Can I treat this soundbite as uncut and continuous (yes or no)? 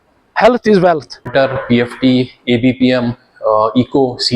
no